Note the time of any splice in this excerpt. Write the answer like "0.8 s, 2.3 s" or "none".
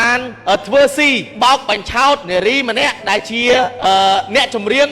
none